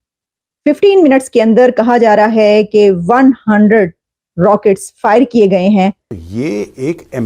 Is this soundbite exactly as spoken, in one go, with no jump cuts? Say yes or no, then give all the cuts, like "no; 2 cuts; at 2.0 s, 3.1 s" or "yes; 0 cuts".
no; 1 cut; at 6.1 s